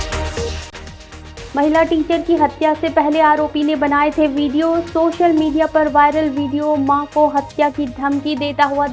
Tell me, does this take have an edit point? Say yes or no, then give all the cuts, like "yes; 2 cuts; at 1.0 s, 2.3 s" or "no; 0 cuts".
yes; 1 cut; at 1.3 s